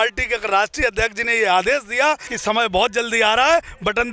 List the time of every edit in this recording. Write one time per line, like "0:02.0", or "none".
0:02.3